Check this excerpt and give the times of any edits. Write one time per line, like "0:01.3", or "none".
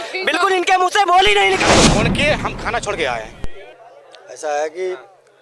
0:01.6

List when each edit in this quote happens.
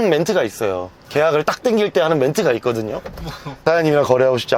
0:03.6

